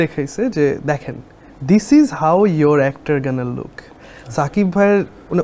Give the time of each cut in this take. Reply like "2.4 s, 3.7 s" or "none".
none